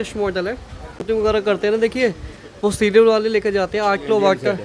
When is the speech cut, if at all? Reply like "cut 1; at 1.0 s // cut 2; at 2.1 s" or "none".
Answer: cut 1; at 0.9 s